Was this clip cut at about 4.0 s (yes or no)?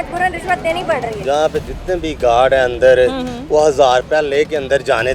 no